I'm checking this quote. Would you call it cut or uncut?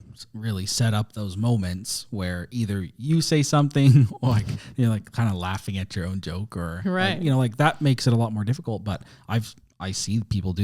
uncut